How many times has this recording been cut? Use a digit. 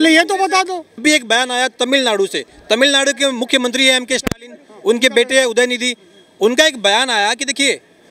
1